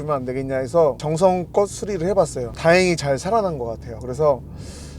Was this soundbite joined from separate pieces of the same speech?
yes; 2 cuts; at 1.0 s, 2.5 s

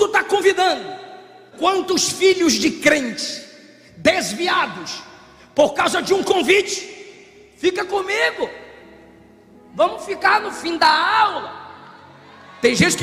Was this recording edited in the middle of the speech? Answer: yes; 1 cut; at 1.4 s

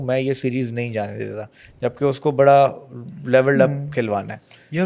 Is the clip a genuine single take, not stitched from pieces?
yes; 0 cuts

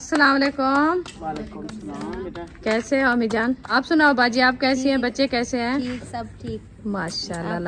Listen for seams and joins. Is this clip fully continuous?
no; 1 cut; at 3.6 s

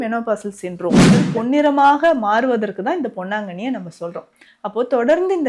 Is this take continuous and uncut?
no; 1 cut; at 1.1 s

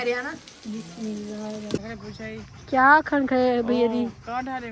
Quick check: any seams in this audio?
yes; 1 cut; at 1.8 s

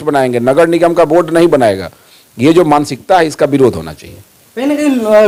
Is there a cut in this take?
no; 0 cuts

